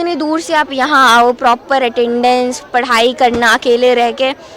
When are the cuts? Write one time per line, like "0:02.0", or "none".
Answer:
none